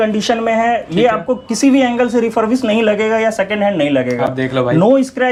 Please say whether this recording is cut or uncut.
uncut